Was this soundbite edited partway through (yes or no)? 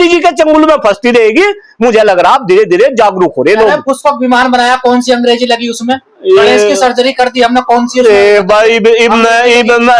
no